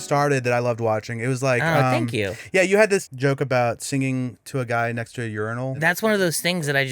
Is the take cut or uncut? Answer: cut